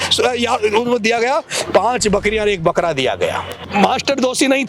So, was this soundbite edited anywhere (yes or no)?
yes